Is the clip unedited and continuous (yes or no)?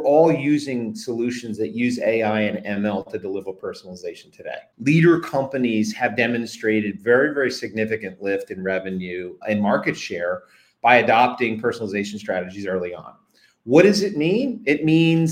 no